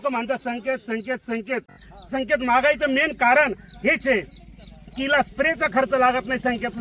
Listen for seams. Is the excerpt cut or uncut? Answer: cut